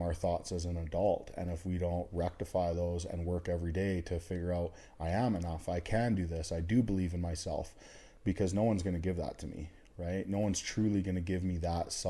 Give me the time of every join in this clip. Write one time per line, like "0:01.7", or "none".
none